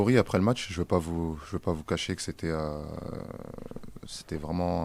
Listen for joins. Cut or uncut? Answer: uncut